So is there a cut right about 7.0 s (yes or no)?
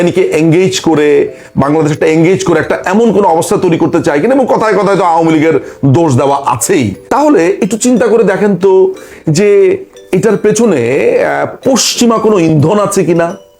yes